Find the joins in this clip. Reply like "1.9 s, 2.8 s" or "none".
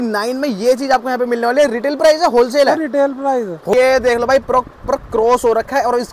3.7 s